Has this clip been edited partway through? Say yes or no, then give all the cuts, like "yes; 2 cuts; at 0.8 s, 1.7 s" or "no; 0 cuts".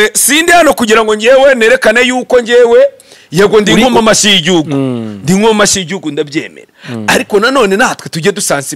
no; 0 cuts